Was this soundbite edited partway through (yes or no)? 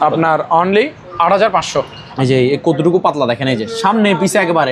yes